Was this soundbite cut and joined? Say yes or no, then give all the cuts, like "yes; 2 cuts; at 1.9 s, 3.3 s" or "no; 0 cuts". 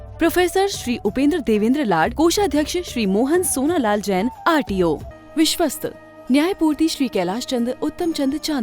yes; 1 cut; at 5.1 s